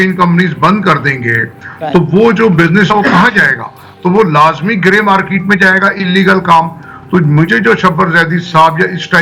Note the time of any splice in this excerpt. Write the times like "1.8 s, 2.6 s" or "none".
none